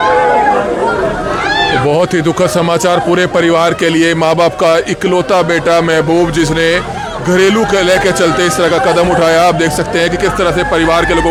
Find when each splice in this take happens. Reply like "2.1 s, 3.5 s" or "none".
none